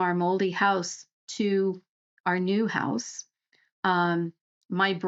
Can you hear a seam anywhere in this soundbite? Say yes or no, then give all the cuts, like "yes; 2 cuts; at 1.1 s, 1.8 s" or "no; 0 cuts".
no; 0 cuts